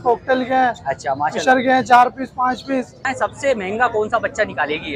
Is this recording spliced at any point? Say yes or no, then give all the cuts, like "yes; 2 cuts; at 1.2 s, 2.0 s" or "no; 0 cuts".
yes; 1 cut; at 3.1 s